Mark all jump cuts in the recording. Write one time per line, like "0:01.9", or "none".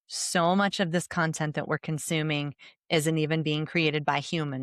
none